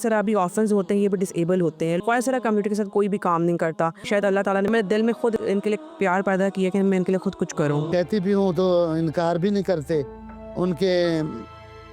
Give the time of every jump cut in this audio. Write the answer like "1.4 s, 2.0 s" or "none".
2.0 s, 4.2 s, 5.4 s, 7.9 s